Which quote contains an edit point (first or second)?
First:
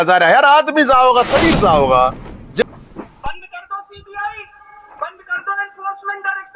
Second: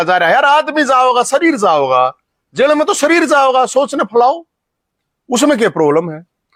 first